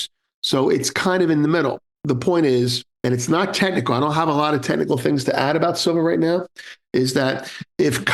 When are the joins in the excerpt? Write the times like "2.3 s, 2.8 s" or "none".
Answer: 1.9 s, 2.8 s